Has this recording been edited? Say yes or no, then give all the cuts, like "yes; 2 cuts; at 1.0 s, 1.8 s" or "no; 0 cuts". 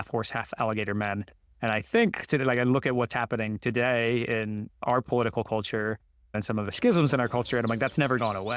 no; 0 cuts